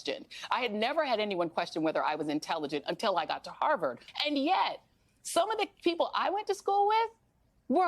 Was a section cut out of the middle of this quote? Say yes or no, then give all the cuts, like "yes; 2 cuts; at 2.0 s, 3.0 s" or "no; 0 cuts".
yes; 1 cut; at 4.1 s